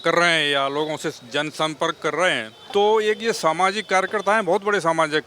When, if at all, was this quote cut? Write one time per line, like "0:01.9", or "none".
0:02.5